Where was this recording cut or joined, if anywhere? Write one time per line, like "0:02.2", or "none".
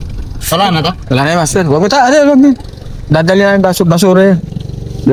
none